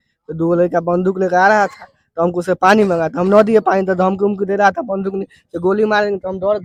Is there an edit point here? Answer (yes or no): no